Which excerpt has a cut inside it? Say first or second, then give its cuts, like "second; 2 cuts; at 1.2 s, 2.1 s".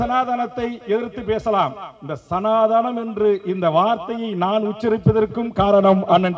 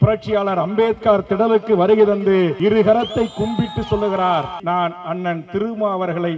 second; 2 cuts; at 2.6 s, 4.6 s